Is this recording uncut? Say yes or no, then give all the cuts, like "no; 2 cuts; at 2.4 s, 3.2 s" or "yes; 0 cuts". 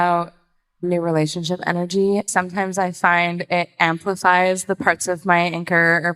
no; 2 cuts; at 0.8 s, 2.3 s